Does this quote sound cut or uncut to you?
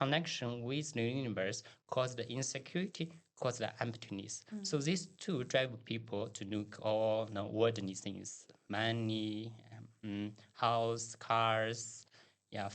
uncut